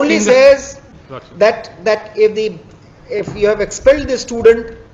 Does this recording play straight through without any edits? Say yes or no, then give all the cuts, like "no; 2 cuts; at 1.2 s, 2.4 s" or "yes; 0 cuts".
yes; 0 cuts